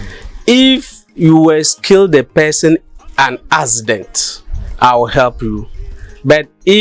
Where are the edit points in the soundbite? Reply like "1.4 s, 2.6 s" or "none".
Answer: none